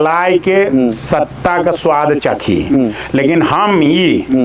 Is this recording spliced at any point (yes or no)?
no